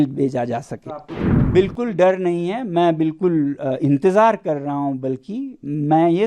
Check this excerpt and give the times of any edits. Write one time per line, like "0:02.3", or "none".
0:01.3